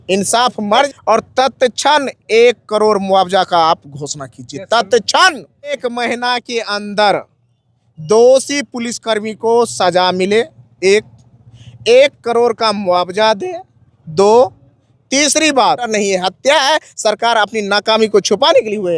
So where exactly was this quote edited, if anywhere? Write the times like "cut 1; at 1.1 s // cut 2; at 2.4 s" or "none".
cut 1; at 0.9 s // cut 2; at 5.8 s // cut 3; at 15.9 s